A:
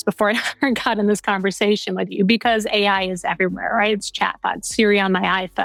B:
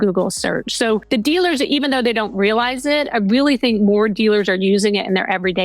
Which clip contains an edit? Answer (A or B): B